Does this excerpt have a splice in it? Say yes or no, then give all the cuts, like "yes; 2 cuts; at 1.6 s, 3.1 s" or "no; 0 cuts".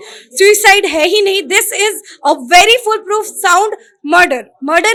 no; 0 cuts